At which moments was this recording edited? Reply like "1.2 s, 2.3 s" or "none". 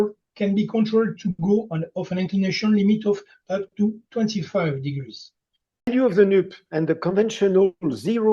5.9 s